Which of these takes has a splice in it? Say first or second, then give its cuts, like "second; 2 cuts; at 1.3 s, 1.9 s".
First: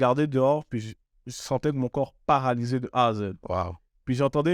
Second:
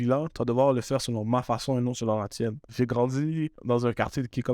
second; 2 cuts; at 2.7 s, 3.6 s